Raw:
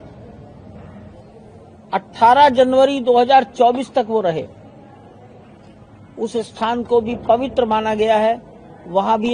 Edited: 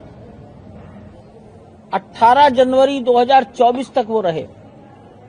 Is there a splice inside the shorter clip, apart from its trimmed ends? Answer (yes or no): no